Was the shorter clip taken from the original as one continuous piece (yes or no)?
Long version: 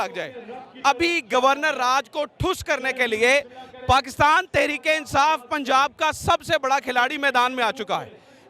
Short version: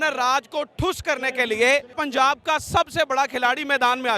no